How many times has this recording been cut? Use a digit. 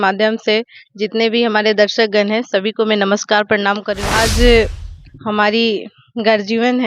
1